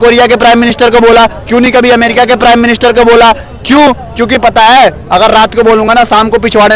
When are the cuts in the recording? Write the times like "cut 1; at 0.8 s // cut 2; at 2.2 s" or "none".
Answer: none